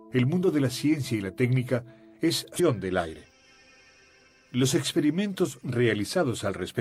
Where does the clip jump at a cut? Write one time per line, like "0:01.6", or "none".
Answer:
none